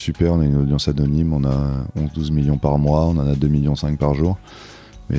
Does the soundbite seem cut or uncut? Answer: uncut